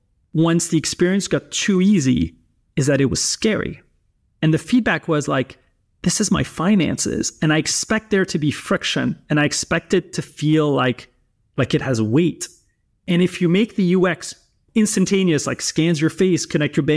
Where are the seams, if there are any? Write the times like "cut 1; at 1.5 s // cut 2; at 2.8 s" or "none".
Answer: none